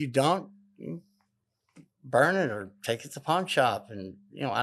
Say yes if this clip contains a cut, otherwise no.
no